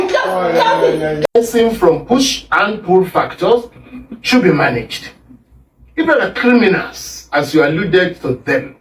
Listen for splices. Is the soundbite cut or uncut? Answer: cut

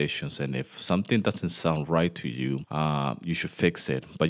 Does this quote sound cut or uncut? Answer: cut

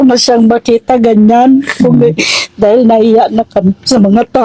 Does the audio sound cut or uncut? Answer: uncut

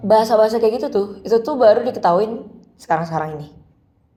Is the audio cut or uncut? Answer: uncut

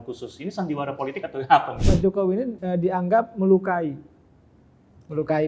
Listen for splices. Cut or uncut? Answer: cut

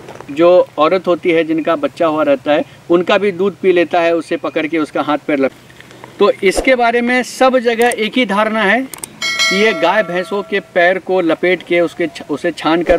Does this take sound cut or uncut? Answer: cut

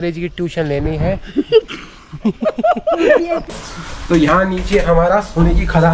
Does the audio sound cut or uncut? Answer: cut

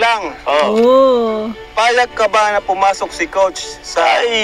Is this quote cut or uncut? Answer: uncut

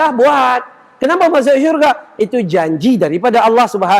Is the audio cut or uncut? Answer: uncut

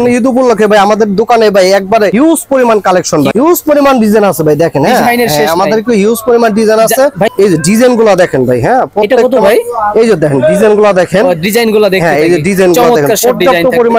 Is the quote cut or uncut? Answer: cut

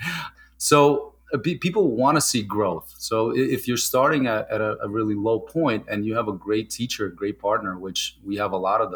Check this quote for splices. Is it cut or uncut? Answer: uncut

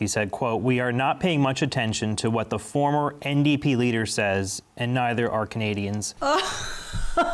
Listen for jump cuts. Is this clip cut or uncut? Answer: cut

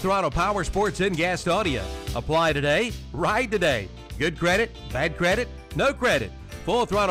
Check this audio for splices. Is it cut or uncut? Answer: uncut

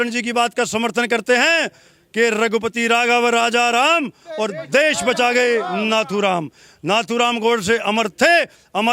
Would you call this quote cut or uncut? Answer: uncut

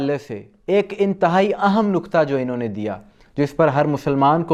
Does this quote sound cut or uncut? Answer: uncut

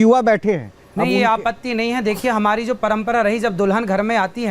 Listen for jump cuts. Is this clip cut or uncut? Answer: cut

